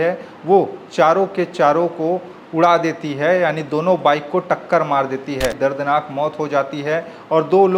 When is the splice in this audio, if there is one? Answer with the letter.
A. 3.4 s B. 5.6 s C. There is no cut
B